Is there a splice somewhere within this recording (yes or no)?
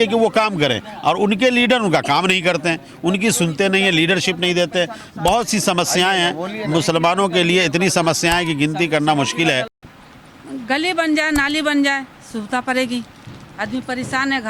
yes